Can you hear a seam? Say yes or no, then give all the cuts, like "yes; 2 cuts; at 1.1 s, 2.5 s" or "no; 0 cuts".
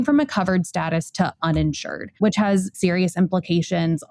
yes; 1 cut; at 2.8 s